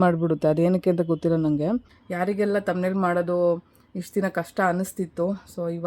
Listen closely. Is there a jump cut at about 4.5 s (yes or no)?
no